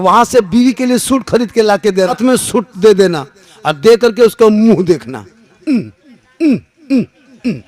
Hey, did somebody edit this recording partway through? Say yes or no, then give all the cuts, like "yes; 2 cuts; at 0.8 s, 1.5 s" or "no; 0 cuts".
yes; 1 cut; at 2.2 s